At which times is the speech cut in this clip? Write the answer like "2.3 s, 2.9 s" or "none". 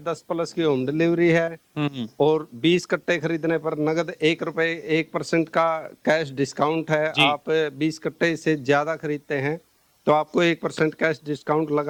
none